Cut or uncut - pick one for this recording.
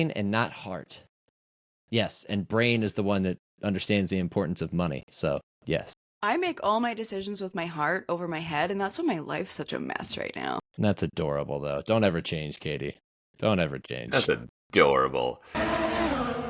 cut